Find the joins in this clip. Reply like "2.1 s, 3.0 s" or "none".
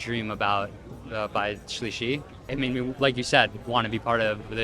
2.3 s